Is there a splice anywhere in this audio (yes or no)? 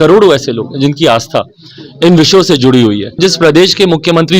yes